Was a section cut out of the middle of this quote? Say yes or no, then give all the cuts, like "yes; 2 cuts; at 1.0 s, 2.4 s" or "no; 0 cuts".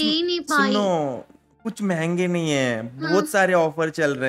no; 0 cuts